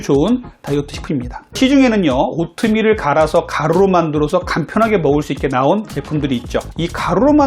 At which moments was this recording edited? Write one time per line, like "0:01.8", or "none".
0:01.6